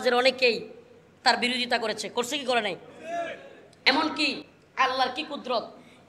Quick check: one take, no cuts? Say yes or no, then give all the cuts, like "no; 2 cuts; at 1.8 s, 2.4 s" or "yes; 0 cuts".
no; 1 cut; at 4.4 s